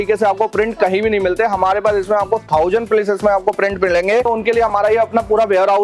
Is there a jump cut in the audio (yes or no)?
yes